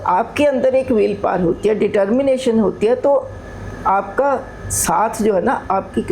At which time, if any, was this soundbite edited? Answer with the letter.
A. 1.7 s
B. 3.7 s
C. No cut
C